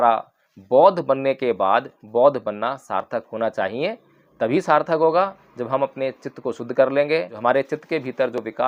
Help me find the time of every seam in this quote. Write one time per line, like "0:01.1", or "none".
none